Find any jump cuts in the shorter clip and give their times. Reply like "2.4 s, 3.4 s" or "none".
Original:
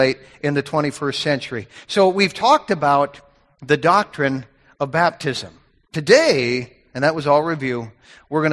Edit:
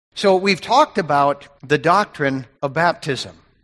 1.5 s, 2.5 s